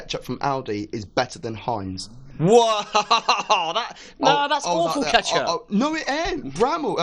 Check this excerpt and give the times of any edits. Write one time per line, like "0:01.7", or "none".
none